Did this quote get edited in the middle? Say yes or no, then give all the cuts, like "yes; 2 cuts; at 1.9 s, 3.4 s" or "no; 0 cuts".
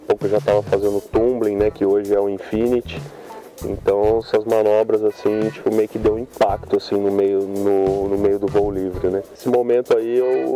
yes; 1 cut; at 9.4 s